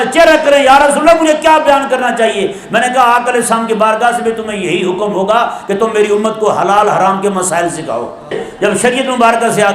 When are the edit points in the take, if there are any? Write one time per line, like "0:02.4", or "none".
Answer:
0:08.4